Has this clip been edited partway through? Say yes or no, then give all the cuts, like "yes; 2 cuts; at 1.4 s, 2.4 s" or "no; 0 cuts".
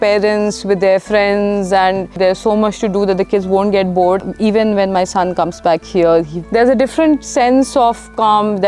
yes; 3 cuts; at 2.2 s, 4.2 s, 6.3 s